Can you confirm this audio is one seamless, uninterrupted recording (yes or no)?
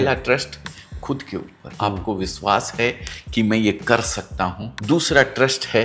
no